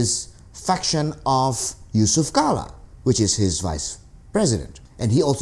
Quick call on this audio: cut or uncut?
uncut